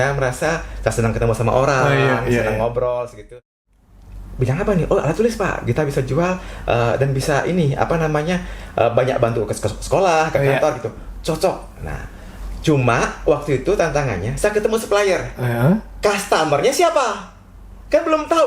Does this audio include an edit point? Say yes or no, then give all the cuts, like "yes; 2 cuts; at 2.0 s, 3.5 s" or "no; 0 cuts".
yes; 1 cut; at 3.3 s